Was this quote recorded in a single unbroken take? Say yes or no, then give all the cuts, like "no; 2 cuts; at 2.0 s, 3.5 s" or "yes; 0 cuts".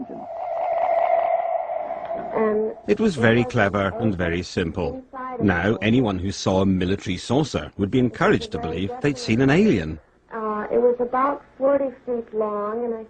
yes; 0 cuts